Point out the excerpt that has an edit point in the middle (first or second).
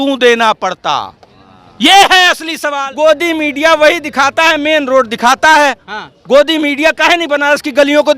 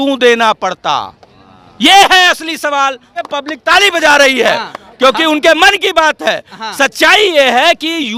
first